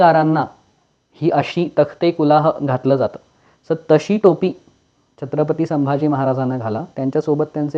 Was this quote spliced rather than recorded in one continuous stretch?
no; 0 cuts

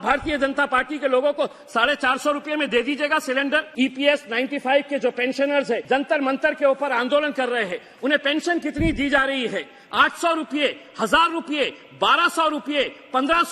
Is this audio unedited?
no; 3 cuts; at 3.7 s, 5.8 s, 9.8 s

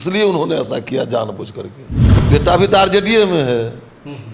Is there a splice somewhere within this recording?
yes; 1 cut; at 1.9 s

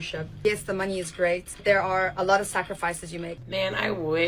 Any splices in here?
yes; 2 cuts; at 1.5 s, 3.3 s

